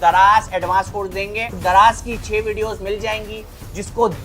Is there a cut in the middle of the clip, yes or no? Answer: yes